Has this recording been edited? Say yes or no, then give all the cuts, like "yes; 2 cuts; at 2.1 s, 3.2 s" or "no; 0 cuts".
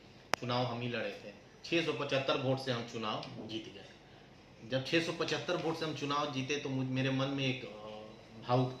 no; 0 cuts